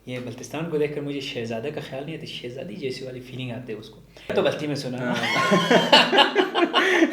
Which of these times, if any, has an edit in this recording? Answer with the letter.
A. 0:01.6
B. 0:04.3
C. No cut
B